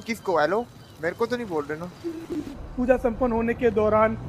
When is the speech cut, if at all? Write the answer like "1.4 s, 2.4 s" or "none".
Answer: 2.6 s